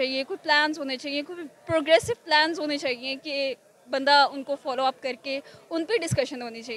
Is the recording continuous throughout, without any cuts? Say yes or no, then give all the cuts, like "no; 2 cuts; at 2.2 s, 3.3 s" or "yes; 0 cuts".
yes; 0 cuts